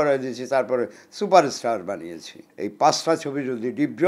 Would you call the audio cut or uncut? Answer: cut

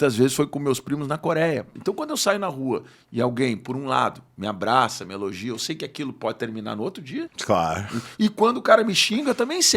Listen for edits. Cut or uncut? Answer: cut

